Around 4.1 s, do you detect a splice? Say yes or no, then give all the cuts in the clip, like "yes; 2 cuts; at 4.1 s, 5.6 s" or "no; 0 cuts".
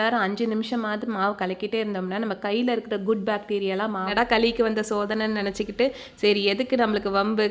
yes; 1 cut; at 4.1 s